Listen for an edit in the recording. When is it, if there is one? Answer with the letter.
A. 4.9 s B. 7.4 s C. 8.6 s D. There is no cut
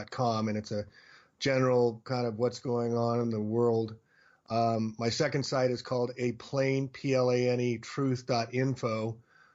A